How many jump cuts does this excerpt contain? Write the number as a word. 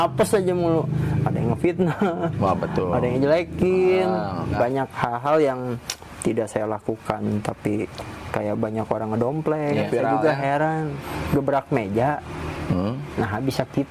two